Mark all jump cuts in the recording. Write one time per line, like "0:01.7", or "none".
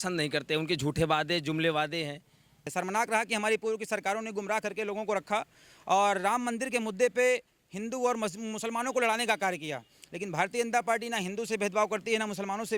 0:02.7